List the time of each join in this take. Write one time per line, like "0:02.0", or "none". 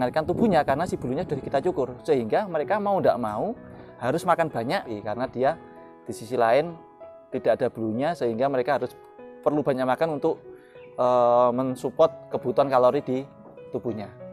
0:04.9

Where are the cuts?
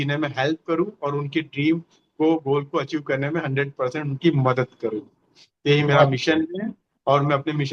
none

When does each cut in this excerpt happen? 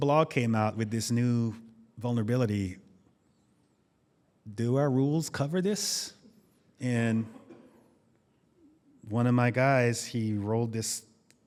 none

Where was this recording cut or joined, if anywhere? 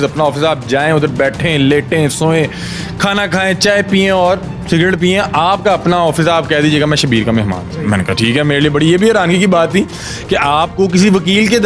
none

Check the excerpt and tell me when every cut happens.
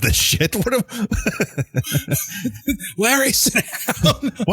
none

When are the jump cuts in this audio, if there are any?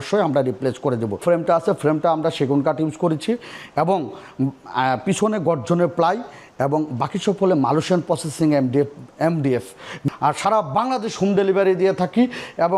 0:01.2
0:10.0

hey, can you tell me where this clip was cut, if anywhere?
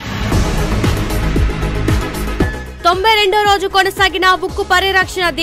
0:01.8

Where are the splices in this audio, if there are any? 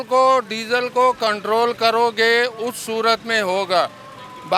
none

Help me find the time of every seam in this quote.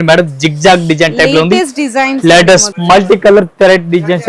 0:02.7

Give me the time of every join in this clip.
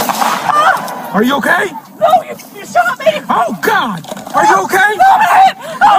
0:00.9

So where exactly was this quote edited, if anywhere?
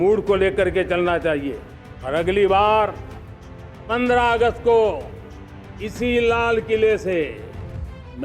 0:01.6

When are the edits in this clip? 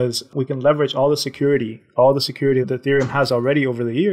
none

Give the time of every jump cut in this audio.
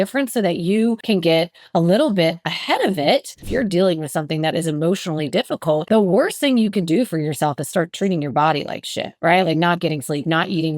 0:01.0
0:03.5
0:05.8

